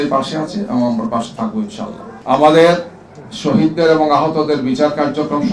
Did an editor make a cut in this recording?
yes; 1 cut; at 2.1 s

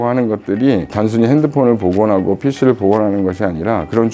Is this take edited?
yes; 1 cut; at 0.9 s

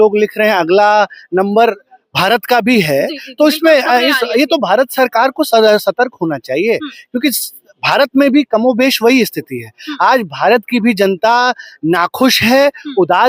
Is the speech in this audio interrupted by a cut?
no; 0 cuts

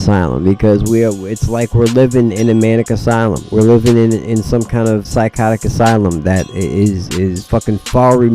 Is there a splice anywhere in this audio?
yes; 4 cuts; at 3.4 s, 5.1 s, 6.5 s, 7.4 s

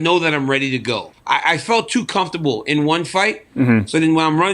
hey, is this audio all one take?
no; 1 cut; at 1.1 s

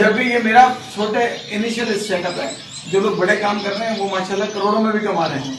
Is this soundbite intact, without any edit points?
yes; 0 cuts

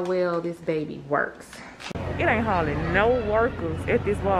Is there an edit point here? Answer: yes; 1 cut; at 2.0 s

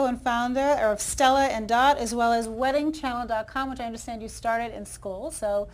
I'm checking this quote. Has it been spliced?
yes; 1 cut; at 2.6 s

